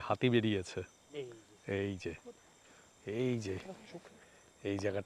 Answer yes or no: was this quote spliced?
yes